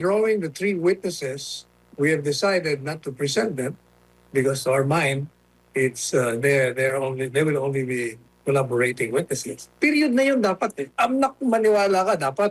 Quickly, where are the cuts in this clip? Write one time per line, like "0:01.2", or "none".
none